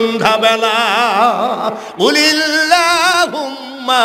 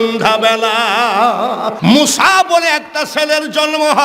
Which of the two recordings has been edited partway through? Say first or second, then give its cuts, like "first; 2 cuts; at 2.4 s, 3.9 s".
second; 1 cut; at 1.8 s